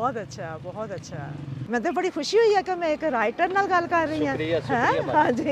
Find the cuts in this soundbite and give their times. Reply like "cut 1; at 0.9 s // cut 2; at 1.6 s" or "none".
cut 1; at 1.5 s